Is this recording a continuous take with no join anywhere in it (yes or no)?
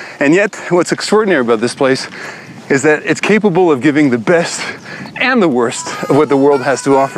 no